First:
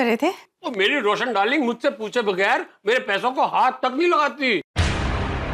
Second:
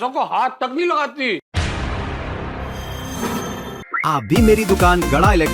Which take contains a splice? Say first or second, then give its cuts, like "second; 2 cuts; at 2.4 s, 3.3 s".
second; 1 cut; at 3.9 s